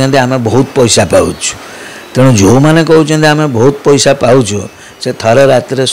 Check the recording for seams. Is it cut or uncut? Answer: uncut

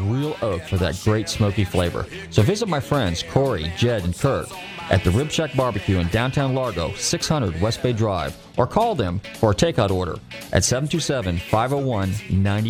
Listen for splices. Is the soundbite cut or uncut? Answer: uncut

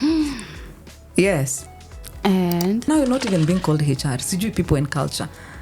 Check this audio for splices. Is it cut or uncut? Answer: cut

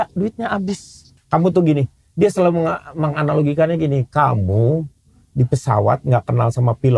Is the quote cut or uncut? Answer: cut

